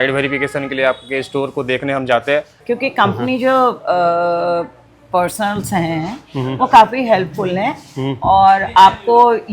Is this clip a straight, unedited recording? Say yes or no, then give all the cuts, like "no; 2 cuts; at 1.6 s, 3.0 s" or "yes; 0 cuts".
no; 1 cut; at 2.5 s